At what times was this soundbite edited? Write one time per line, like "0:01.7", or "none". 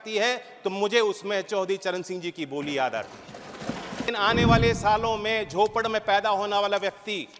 0:04.1